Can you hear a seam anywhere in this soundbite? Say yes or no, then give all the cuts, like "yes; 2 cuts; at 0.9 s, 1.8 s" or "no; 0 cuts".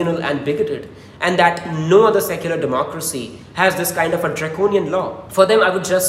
yes; 1 cut; at 5.2 s